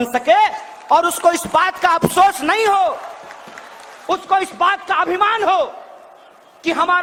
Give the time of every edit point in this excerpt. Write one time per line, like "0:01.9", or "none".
none